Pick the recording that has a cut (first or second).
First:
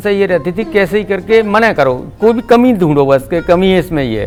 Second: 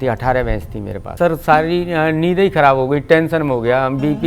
second